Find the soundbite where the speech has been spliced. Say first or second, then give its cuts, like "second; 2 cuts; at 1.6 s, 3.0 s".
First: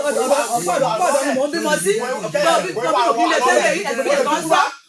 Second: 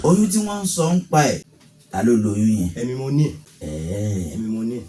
second; 2 cuts; at 1.6 s, 3.5 s